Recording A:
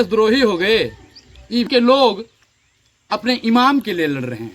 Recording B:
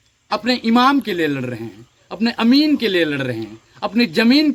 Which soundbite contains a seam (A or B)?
A